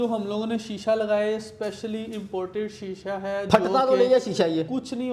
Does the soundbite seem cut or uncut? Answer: uncut